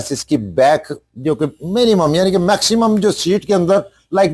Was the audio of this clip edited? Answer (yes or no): no